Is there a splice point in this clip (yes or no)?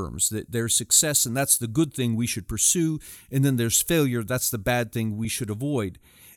yes